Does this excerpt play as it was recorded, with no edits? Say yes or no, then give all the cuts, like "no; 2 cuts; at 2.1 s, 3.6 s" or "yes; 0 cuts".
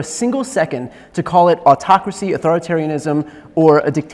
yes; 0 cuts